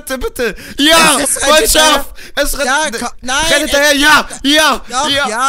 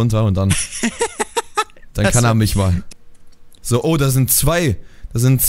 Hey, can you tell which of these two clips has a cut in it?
second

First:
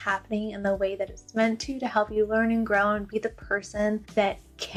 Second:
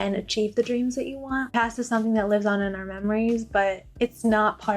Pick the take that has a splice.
second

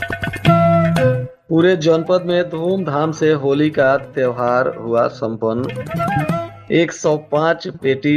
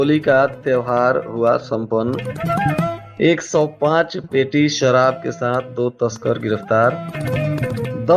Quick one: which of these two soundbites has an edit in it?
first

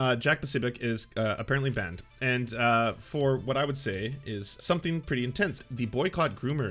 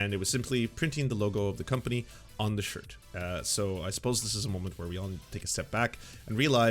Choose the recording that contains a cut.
first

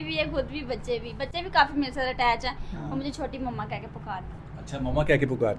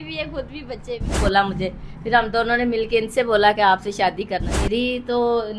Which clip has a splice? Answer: second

